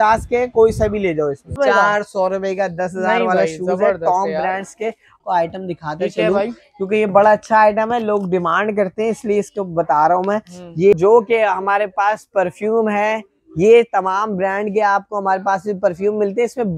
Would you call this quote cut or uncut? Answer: cut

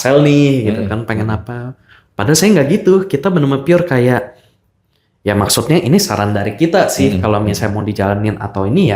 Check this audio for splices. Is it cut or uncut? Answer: uncut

